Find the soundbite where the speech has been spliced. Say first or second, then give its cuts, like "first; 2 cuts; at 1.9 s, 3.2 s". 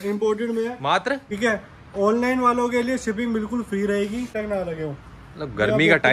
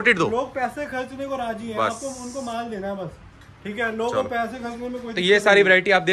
first; 2 cuts; at 1.3 s, 4.3 s